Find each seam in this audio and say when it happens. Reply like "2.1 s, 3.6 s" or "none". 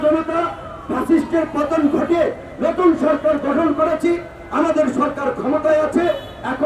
none